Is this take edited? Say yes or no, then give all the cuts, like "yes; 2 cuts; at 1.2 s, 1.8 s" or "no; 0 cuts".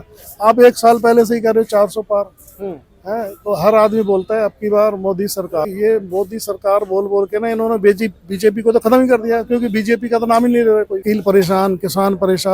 yes; 2 cuts; at 5.7 s, 11.0 s